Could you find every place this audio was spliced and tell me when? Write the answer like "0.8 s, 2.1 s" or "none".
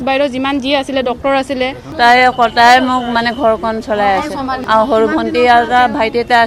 1.8 s, 4.6 s